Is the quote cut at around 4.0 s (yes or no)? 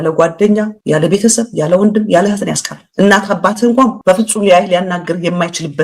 yes